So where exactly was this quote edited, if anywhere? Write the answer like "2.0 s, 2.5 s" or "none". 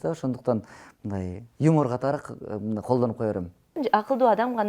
3.8 s